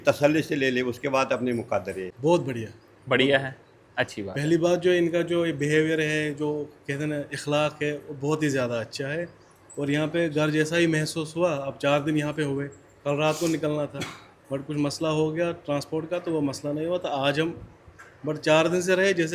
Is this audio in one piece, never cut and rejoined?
no; 1 cut; at 2.0 s

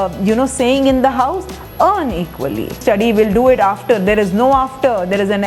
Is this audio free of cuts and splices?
no; 1 cut; at 2.8 s

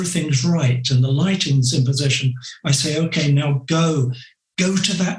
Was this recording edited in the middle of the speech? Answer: no; 0 cuts

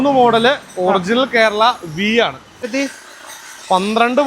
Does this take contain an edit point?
yes; 1 cut; at 2.6 s

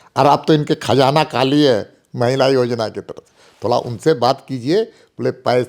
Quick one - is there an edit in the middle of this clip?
no; 0 cuts

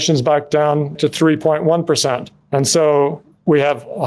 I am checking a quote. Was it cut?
yes; 1 cut; at 1.0 s

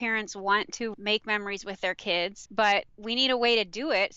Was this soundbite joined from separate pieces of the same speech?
yes; 3 cuts; at 0.9 s, 2.4 s, 3.0 s

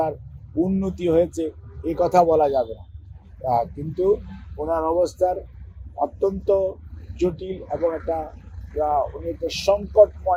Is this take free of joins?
yes; 0 cuts

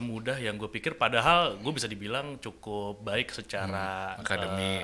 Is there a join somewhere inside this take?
no; 0 cuts

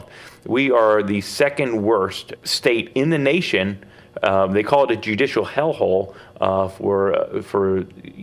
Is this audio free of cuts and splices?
no; 1 cut; at 2.3 s

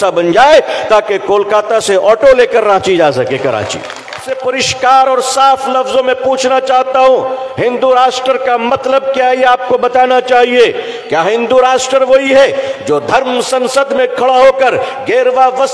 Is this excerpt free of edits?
no; 1 cut; at 4.3 s

